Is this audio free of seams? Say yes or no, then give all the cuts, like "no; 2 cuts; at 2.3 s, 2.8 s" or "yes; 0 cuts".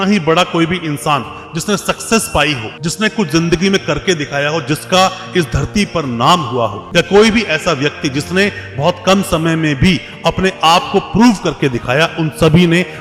yes; 0 cuts